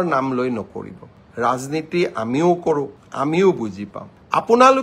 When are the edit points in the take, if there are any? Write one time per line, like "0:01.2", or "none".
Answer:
none